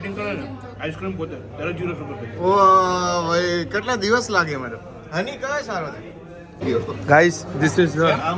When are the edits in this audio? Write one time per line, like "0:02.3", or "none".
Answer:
0:06.6